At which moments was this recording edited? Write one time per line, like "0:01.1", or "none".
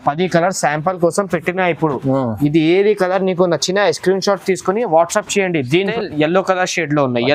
0:05.9